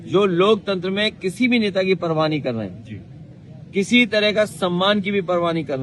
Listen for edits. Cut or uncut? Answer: uncut